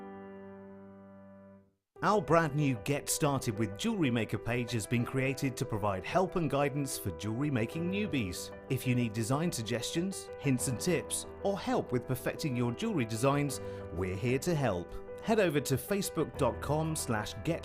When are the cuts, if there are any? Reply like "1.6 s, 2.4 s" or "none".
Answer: 1.7 s